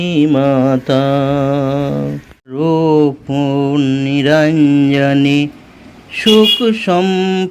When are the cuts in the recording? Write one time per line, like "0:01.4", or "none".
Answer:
0:02.6